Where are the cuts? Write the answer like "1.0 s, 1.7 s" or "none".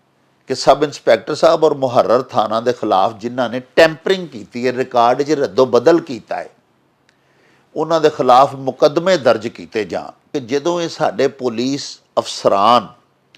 10.3 s